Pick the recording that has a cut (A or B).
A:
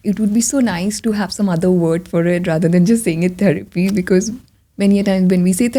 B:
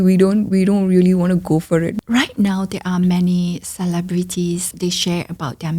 B